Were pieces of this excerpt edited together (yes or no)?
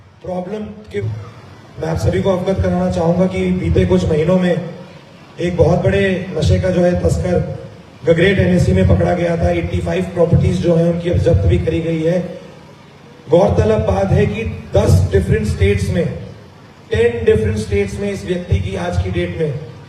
yes